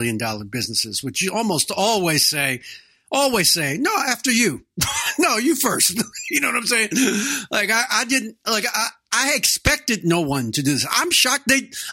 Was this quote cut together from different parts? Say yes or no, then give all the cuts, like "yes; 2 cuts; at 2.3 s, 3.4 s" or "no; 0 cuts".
no; 0 cuts